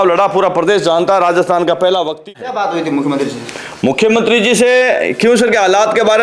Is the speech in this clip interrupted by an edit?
yes; 1 cut; at 2.3 s

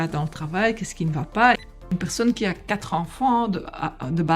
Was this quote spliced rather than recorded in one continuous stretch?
yes; 1 cut; at 1.7 s

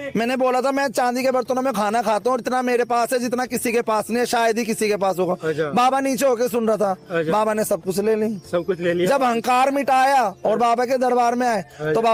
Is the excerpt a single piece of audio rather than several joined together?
yes; 0 cuts

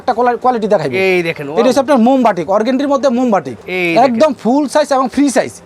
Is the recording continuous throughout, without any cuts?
no; 1 cut; at 3.6 s

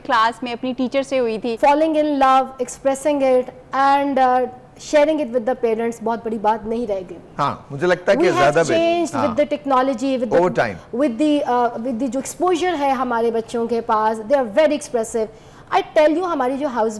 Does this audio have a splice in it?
yes; 1 cut; at 1.5 s

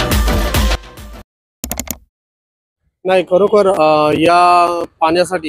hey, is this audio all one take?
yes; 0 cuts

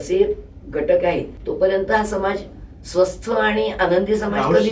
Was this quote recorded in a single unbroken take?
no; 1 cut; at 1.4 s

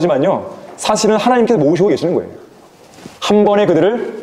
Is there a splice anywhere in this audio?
no; 0 cuts

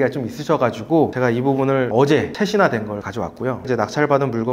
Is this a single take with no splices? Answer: yes; 0 cuts

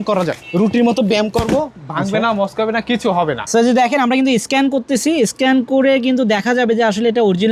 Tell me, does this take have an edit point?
yes; 1 cut; at 3.4 s

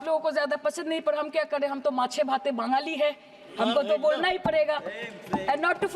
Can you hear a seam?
no; 0 cuts

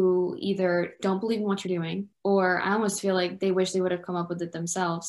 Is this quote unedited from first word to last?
no; 1 cut; at 2.1 s

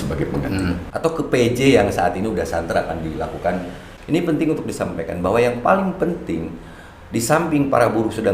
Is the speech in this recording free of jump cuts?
no; 2 cuts; at 0.9 s, 3.9 s

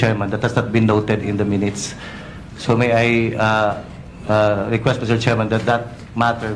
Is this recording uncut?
no; 1 cut; at 4.3 s

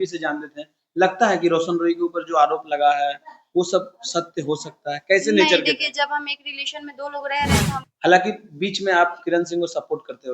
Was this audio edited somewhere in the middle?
yes; 1 cut; at 7.8 s

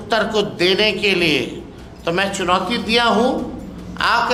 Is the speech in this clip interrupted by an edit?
no; 0 cuts

